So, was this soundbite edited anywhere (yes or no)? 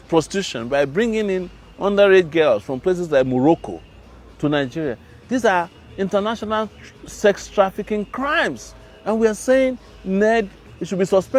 no